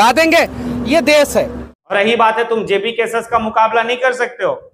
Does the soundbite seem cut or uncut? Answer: cut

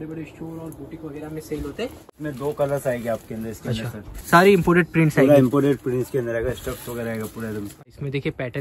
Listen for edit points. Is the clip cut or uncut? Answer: cut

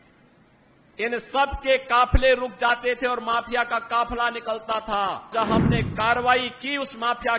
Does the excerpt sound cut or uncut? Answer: cut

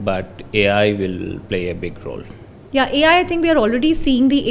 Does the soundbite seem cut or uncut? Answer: uncut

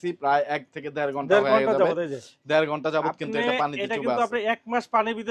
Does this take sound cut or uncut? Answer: uncut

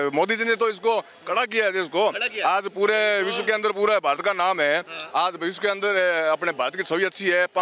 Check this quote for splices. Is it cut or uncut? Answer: uncut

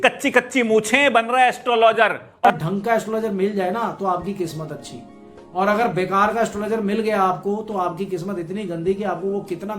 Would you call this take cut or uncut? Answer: cut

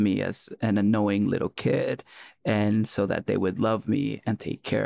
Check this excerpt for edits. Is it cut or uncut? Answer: uncut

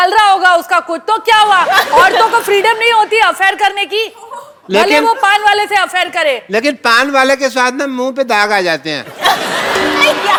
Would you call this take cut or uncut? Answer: uncut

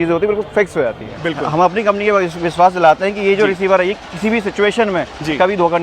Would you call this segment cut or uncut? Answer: cut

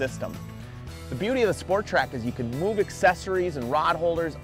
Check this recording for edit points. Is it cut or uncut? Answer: cut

